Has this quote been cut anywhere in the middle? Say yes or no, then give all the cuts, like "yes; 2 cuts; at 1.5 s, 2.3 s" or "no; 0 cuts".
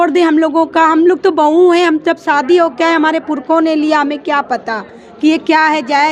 no; 0 cuts